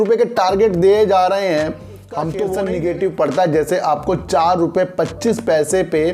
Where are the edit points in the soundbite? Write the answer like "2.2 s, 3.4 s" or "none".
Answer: 2.6 s